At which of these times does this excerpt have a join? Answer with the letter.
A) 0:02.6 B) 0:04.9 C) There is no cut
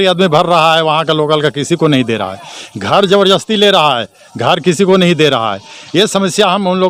C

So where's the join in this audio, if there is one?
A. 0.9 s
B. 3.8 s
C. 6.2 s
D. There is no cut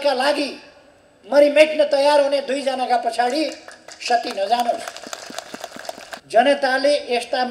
C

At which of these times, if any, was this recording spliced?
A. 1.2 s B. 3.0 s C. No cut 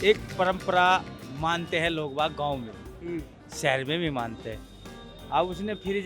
A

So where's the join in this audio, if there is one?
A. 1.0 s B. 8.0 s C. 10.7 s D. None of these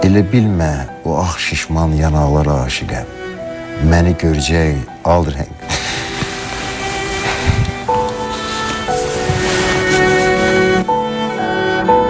D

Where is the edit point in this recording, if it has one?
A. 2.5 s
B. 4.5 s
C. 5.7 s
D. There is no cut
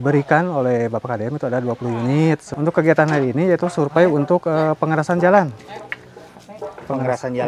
A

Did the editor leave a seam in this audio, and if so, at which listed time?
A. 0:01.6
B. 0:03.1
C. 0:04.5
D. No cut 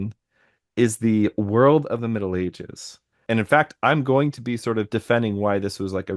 B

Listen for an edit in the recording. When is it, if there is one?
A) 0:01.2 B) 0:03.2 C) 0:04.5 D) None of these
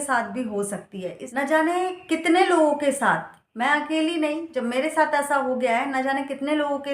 A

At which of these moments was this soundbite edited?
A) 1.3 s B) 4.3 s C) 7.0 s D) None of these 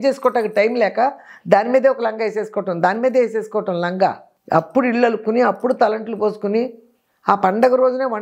B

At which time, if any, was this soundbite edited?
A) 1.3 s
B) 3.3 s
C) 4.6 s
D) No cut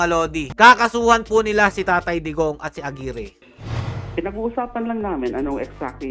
D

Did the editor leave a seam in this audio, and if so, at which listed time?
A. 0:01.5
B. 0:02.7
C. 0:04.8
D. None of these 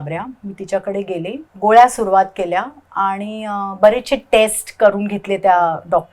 A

